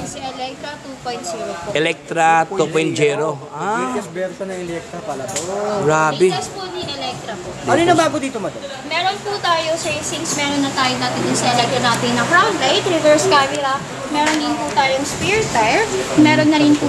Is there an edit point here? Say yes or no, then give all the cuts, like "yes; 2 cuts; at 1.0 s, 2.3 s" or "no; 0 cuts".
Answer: no; 0 cuts